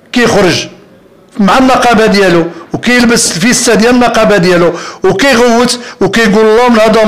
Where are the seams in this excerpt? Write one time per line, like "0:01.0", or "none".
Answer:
none